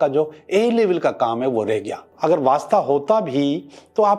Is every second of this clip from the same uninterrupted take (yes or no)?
no